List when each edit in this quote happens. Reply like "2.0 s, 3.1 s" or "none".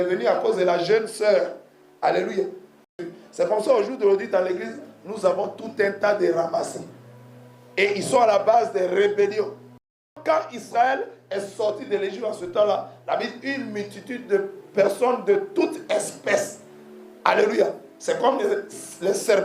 3.0 s, 10.2 s